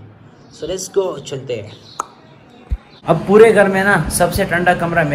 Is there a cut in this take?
yes; 1 cut; at 2.9 s

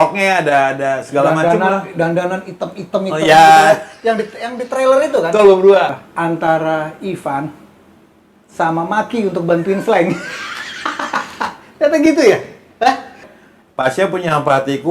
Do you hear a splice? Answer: yes; 2 cuts; at 6.0 s, 13.3 s

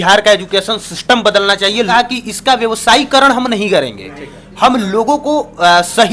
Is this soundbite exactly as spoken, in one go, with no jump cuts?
no; 1 cut; at 1.9 s

